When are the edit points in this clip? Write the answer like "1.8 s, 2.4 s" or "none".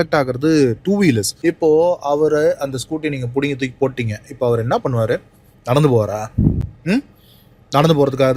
1.3 s